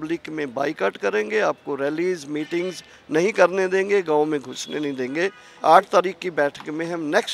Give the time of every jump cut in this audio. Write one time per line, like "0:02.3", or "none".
0:05.5